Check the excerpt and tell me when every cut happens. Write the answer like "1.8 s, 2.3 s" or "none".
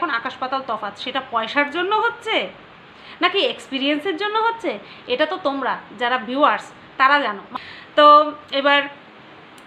none